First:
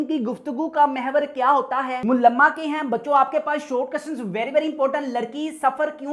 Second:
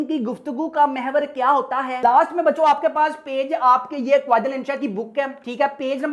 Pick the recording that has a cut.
second; 1 cut; at 1.9 s

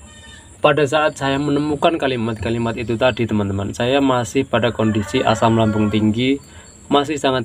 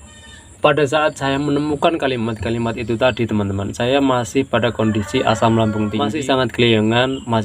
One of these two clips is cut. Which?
second; 1 cut; at 6.1 s

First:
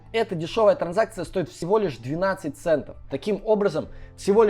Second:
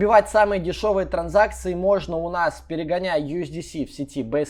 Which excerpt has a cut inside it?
first; 1 cut; at 3.2 s

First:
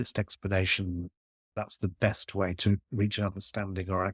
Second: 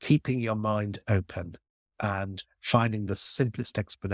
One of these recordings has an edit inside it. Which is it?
first; 2 cuts; at 1.5 s, 2.8 s

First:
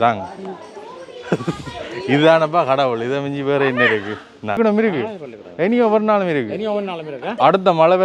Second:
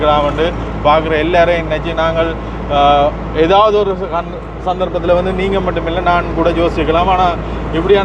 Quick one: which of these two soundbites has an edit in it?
first; 1 cut; at 4.6 s

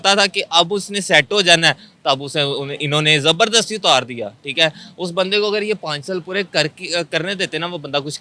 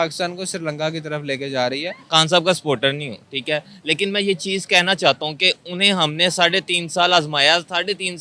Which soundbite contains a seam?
second; 1 cut; at 2.0 s

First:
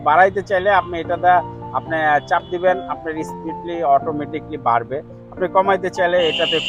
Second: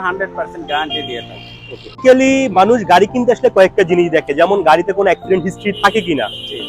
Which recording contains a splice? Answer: second; 1 cut; at 1.9 s

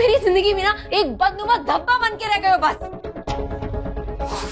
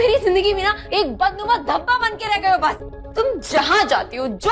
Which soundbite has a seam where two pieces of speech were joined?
second; 1 cut; at 2.9 s

